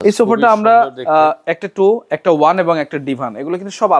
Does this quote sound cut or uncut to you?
uncut